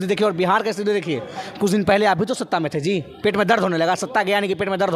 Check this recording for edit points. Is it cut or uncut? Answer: uncut